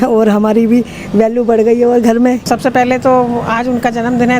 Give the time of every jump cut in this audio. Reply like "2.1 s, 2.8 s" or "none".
2.4 s